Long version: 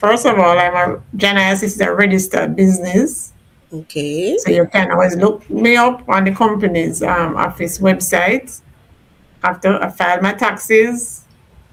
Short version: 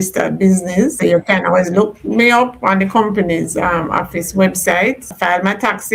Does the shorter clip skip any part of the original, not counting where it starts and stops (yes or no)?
yes